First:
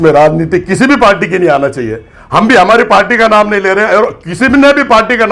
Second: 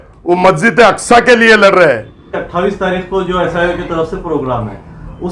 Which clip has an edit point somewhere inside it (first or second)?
second